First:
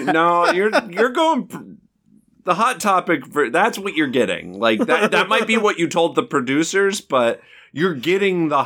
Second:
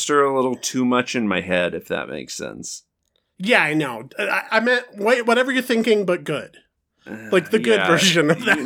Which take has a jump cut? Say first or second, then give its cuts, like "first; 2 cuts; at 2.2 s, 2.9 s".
second; 1 cut; at 4.0 s